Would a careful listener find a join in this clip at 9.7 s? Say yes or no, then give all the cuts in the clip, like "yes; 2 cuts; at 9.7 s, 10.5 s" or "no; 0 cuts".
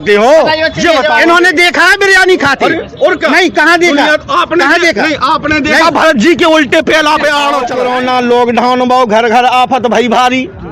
no; 1 cut; at 7.7 s